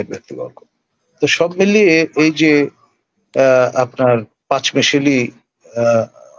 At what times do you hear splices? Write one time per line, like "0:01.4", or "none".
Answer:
none